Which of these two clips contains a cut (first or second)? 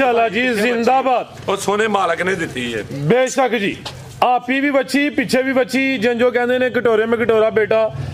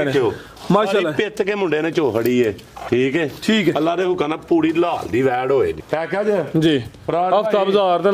second